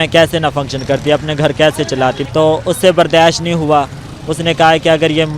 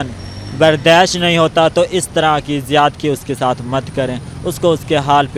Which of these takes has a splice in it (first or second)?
first